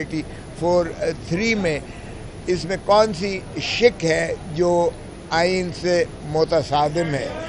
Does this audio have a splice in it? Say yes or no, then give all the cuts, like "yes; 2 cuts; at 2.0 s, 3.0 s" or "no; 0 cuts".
no; 0 cuts